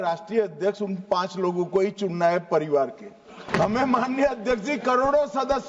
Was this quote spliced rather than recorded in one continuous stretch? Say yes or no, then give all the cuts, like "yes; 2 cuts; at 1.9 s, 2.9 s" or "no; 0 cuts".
yes; 1 cut; at 3.4 s